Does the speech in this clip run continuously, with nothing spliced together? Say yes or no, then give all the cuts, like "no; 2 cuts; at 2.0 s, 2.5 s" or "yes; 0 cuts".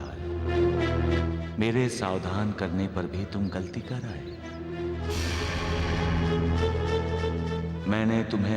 yes; 0 cuts